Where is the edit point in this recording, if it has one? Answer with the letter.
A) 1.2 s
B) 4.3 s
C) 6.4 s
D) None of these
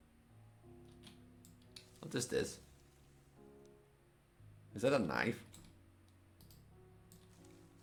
D